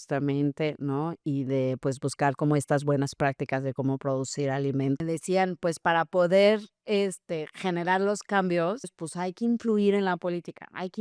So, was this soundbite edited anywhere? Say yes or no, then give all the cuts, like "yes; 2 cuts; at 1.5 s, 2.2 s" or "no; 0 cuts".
yes; 2 cuts; at 5.0 s, 9.0 s